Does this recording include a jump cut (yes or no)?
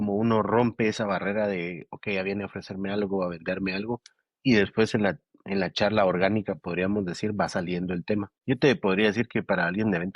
yes